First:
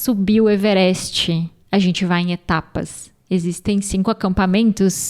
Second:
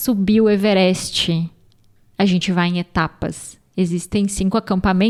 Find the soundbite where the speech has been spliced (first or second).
first